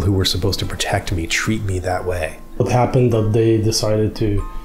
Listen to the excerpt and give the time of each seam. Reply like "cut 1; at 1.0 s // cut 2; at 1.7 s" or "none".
cut 1; at 2.6 s